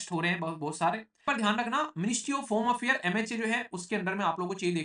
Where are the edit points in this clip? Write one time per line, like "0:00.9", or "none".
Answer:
0:01.3